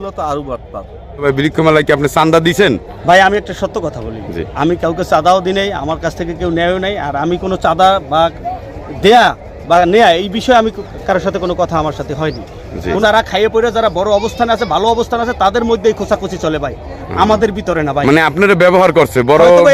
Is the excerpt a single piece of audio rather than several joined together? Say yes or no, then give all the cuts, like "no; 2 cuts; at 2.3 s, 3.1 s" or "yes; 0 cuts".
no; 2 cuts; at 1.2 s, 13.0 s